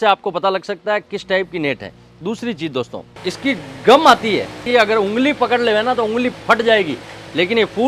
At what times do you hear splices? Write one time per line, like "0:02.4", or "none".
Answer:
0:03.1
0:04.6